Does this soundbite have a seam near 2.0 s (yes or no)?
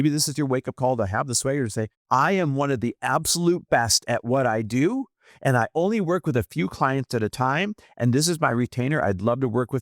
yes